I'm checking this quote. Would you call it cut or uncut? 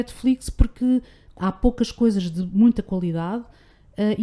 cut